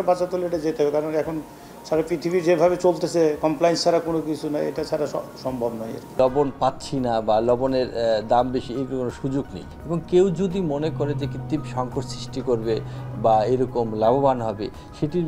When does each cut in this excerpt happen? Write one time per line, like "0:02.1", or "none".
0:06.1